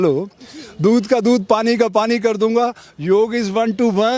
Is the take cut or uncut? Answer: uncut